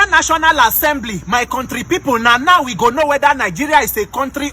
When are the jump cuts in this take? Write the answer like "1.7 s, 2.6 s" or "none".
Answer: none